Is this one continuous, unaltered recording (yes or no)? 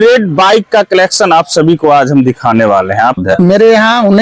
no